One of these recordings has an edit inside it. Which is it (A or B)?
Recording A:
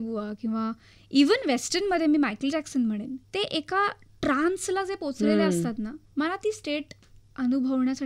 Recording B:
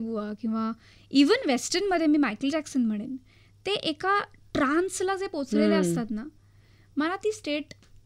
A